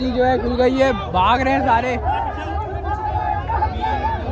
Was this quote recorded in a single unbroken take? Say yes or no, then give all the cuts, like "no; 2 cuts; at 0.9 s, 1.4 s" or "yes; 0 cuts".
yes; 0 cuts